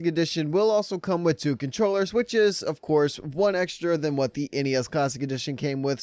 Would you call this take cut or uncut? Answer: cut